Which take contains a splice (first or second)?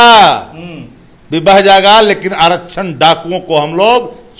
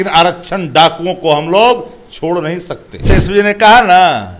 second